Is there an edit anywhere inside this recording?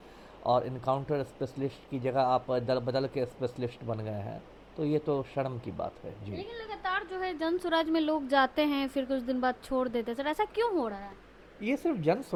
no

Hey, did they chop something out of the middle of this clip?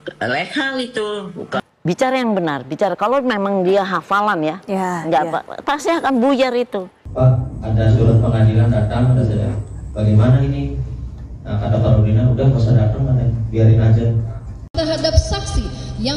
yes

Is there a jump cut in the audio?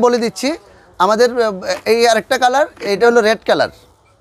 yes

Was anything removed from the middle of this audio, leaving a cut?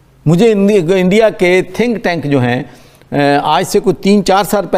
no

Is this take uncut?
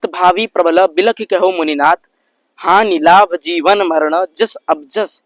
yes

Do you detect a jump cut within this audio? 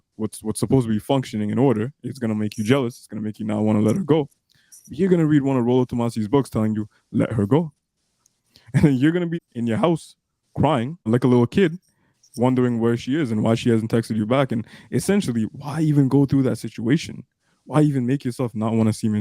yes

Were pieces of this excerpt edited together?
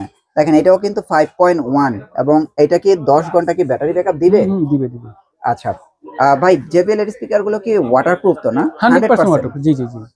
no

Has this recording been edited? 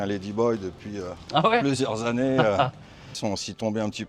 yes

